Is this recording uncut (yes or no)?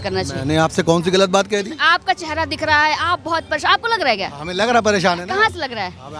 yes